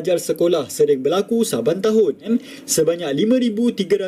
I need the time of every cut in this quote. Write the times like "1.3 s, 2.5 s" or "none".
2.3 s